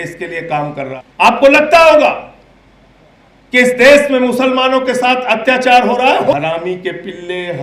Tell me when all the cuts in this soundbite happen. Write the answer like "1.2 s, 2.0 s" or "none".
0.9 s, 6.3 s